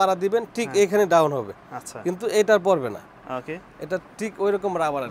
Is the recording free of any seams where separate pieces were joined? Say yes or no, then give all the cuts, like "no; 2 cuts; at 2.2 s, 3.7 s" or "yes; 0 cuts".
yes; 0 cuts